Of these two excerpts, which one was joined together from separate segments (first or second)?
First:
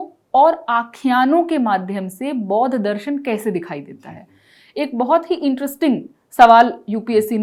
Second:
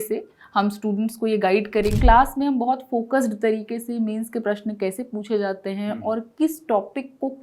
second